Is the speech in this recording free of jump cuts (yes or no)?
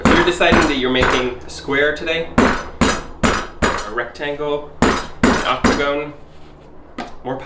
yes